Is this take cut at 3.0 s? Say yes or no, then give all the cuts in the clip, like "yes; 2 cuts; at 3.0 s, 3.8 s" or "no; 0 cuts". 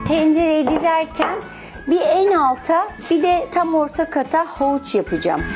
yes; 1 cut; at 3.0 s